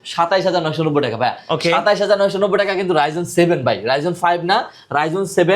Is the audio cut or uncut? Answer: uncut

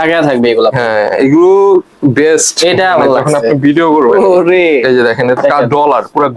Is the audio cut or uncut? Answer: uncut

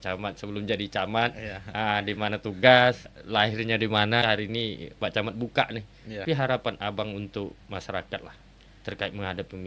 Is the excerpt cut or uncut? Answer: cut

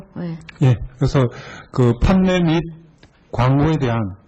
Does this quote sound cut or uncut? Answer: uncut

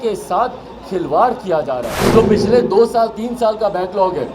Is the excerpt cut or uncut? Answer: cut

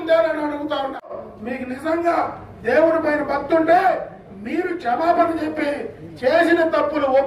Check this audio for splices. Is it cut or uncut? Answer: cut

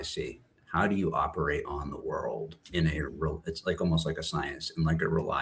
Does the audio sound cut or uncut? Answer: uncut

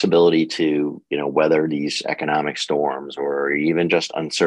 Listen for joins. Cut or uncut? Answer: uncut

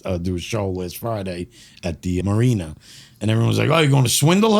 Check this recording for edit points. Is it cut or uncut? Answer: cut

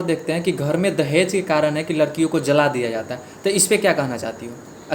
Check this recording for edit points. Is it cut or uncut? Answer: uncut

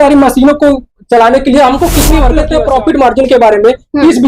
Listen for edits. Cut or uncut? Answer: cut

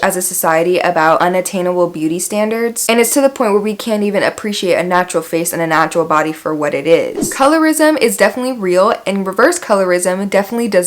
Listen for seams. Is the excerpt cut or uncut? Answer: cut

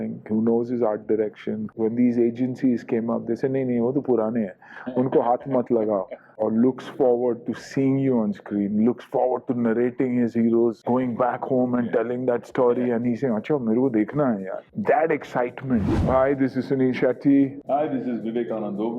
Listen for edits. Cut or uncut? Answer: cut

